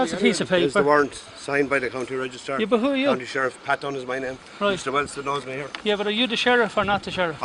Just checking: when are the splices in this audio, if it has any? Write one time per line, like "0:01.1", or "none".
0:01.6